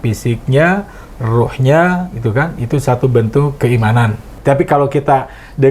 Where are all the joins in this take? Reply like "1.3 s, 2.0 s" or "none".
4.3 s